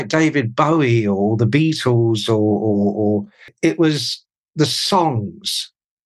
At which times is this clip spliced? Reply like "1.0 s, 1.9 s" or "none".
3.5 s